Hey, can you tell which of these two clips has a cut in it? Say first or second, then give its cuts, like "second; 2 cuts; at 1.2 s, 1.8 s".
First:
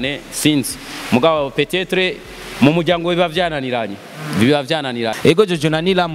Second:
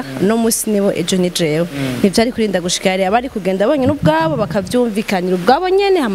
first; 1 cut; at 5.1 s